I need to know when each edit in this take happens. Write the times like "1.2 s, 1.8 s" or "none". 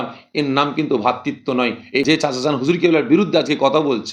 2.0 s